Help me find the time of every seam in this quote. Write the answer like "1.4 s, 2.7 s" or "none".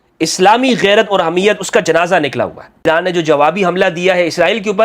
2.8 s